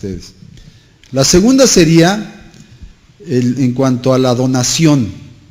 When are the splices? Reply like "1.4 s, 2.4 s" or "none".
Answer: none